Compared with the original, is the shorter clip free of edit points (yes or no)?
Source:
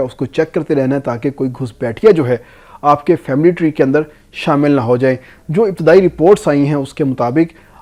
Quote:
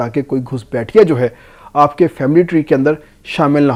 yes